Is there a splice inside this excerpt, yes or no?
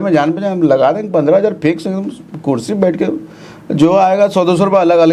no